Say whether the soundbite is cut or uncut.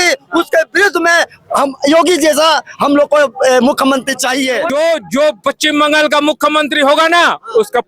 cut